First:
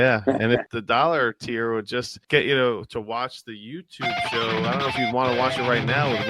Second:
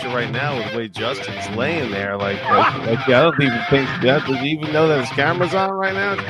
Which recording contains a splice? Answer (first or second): first